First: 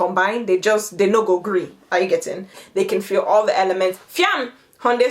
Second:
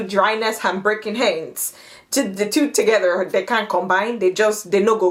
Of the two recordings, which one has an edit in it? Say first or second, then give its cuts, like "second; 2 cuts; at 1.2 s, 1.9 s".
first; 1 cut; at 2.5 s